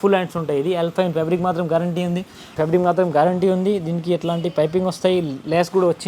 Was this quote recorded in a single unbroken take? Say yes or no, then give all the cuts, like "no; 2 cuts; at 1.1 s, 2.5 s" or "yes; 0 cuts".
no; 1 cut; at 2.6 s